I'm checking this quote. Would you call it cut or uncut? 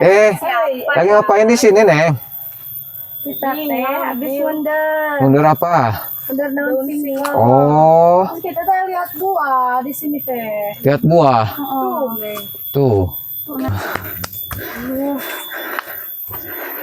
cut